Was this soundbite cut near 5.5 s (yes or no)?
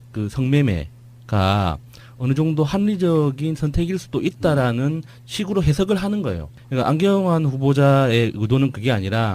yes